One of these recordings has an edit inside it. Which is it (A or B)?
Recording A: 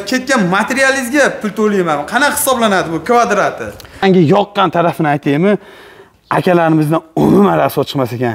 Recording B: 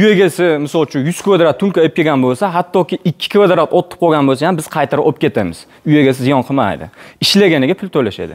A